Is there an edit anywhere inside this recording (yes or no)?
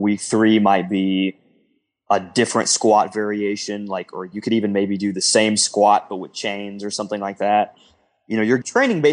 yes